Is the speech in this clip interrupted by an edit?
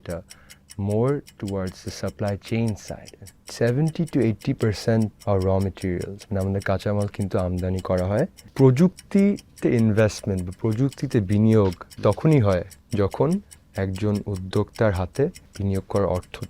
yes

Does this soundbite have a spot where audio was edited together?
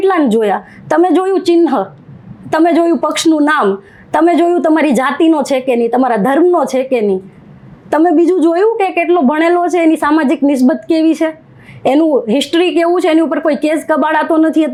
no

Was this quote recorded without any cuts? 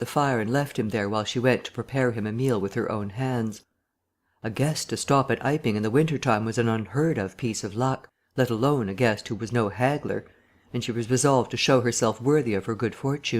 no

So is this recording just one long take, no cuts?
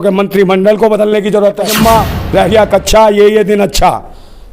no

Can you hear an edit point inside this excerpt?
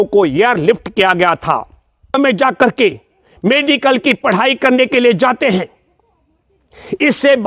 yes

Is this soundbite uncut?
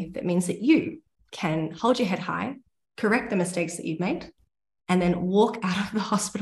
yes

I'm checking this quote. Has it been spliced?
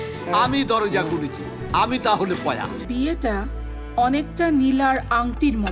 yes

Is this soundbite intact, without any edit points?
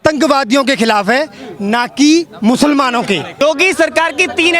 no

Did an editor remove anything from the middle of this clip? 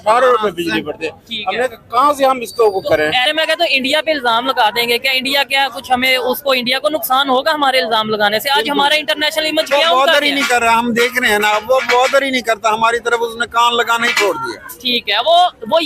yes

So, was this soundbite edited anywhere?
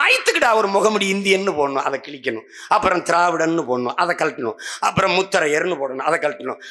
no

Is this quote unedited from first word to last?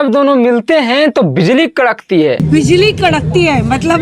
yes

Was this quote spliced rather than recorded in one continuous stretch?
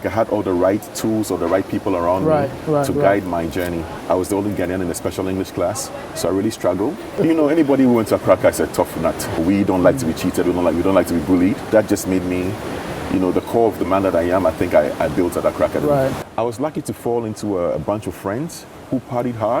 yes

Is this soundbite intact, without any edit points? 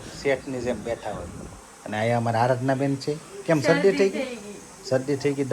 yes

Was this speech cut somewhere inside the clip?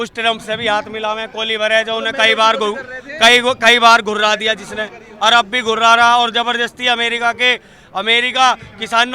no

